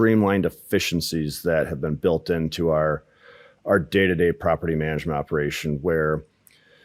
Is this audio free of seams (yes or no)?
yes